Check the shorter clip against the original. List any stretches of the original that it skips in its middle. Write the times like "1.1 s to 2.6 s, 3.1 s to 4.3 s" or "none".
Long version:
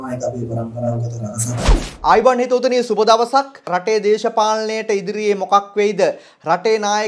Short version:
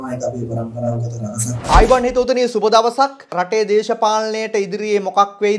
1.5 s to 1.9 s